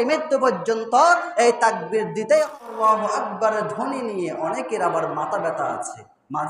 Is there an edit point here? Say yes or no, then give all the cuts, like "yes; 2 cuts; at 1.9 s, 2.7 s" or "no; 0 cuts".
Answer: yes; 1 cut; at 2.5 s